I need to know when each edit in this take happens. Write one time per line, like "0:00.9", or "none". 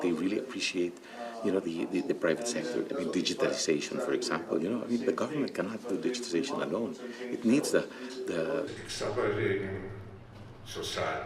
0:08.7